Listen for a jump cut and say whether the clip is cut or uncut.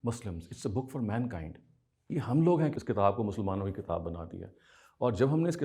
cut